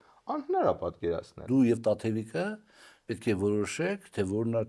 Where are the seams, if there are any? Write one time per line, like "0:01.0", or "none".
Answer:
0:01.4

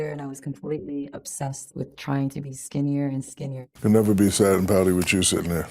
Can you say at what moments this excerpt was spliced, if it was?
0:03.5

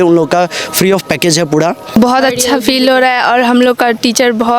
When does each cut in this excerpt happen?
0:02.0

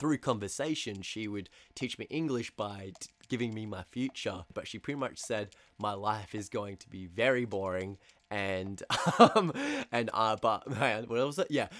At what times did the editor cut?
0:04.5

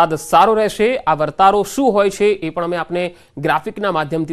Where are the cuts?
0:01.0

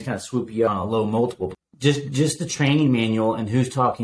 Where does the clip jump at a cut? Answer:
0:00.7
0:01.6

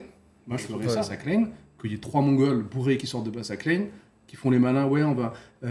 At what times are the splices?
0:01.1

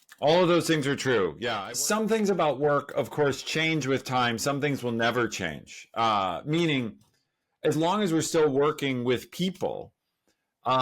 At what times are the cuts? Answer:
0:01.5

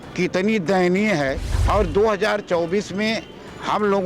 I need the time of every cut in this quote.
0:01.5

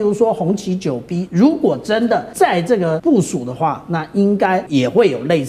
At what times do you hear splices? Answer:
0:02.6
0:04.7

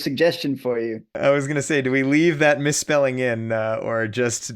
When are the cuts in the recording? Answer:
0:01.1

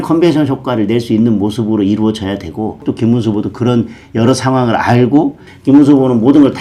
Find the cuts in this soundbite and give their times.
0:02.8
0:05.4

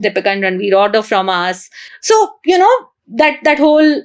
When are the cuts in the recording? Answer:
none

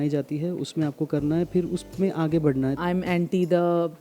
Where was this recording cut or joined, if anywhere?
0:02.8

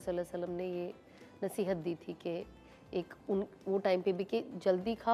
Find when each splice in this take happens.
none

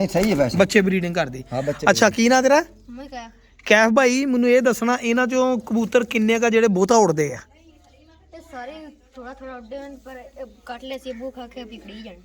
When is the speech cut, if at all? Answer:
none

